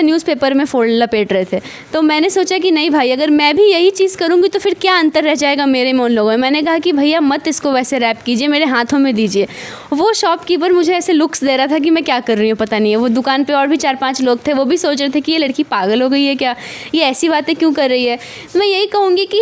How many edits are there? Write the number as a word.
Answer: zero